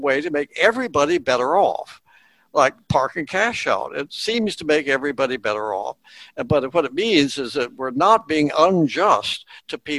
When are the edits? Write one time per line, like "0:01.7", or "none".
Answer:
none